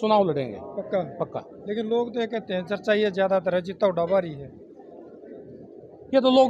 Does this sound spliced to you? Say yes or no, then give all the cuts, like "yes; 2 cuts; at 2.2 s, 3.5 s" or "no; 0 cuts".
no; 0 cuts